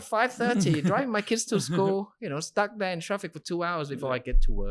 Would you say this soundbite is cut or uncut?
uncut